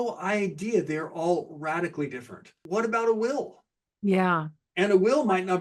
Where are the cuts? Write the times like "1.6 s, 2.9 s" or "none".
2.6 s